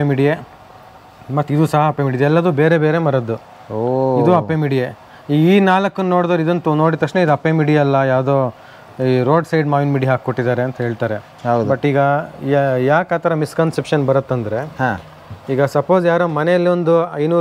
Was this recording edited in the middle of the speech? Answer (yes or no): no